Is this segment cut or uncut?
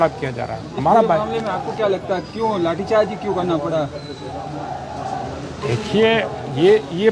uncut